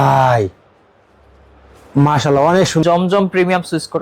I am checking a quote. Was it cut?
yes; 1 cut; at 2.8 s

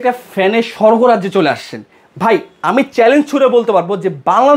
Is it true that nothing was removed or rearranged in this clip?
yes; 0 cuts

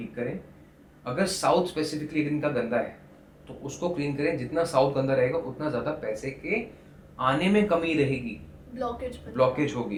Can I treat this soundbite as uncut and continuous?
yes; 0 cuts

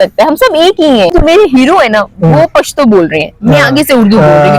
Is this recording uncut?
no; 1 cut; at 1.1 s

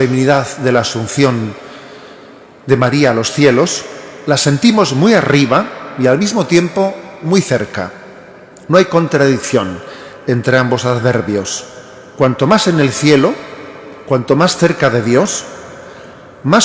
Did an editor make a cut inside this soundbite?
yes; 1 cut; at 12.6 s

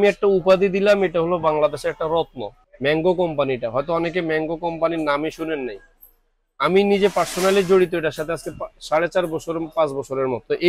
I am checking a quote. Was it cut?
no; 0 cuts

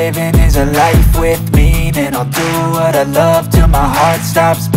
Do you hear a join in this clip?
no; 0 cuts

